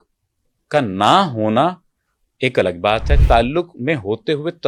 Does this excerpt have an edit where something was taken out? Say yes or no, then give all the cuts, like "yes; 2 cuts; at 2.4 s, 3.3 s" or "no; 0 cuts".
no; 0 cuts